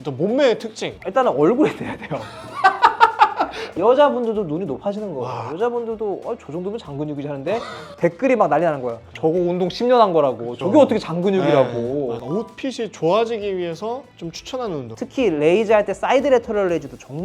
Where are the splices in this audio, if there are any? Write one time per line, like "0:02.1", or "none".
0:03.6
0:12.2
0:14.9

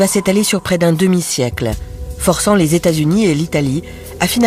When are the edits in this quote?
0:03.2

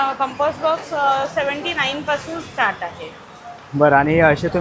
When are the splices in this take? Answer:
none

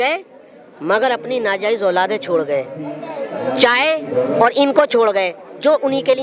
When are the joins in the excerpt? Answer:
none

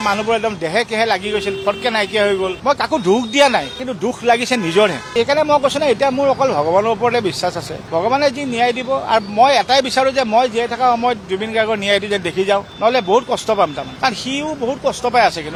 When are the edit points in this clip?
none

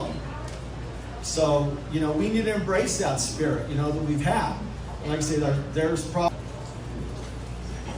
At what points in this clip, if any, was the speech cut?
0:06.3

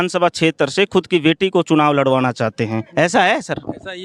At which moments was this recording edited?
none

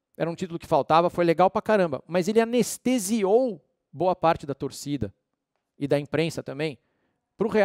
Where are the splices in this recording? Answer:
none

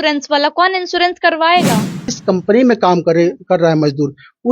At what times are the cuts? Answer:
0:02.1

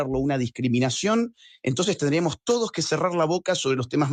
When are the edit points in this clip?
none

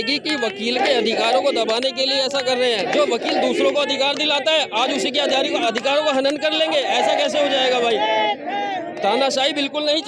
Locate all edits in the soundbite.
none

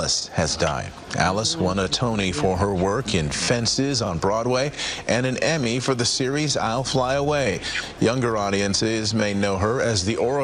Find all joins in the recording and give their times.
none

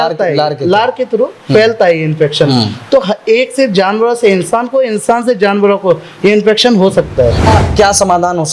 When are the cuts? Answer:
0:07.5

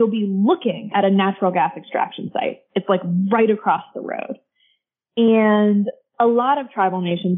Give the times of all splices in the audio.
none

